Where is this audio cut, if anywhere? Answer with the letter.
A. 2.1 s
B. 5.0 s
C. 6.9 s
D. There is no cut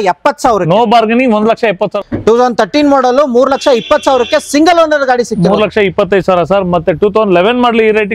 A